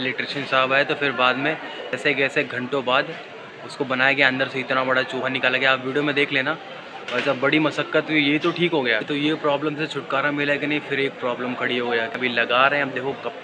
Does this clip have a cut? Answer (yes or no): yes